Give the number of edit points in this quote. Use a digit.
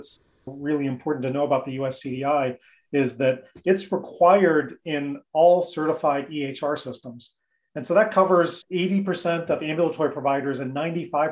1